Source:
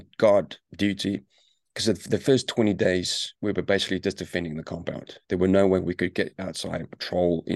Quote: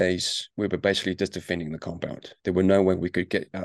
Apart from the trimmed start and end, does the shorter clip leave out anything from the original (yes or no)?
no